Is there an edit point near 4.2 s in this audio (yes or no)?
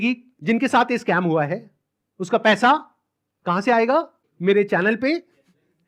yes